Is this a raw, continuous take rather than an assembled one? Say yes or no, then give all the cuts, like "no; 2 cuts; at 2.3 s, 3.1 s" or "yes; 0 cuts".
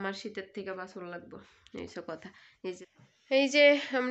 no; 1 cut; at 2.8 s